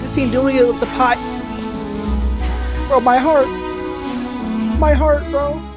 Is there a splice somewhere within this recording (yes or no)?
no